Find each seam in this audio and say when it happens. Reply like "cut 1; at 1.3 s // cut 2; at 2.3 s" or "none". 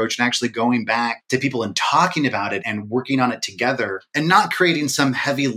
cut 1; at 1.2 s // cut 2; at 2.6 s // cut 3; at 4.0 s